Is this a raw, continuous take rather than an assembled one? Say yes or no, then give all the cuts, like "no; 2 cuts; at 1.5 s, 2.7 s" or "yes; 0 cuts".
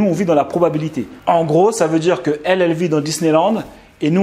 yes; 0 cuts